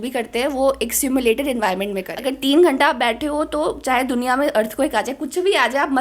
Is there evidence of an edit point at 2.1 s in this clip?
yes; 1 cut; at 2.1 s

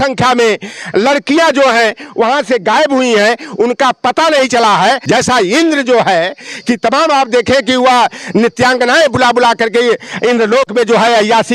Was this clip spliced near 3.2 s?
no; 1 cut; at 5.0 s

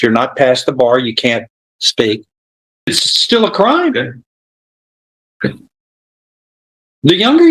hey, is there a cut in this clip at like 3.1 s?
yes; 1 cut; at 3.1 s

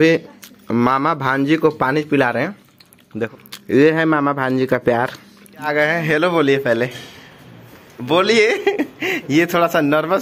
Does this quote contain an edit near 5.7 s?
yes; 2 cuts; at 3.3 s, 5.7 s

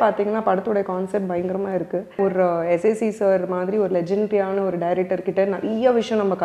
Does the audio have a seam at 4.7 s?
no; 1 cut; at 2.2 s

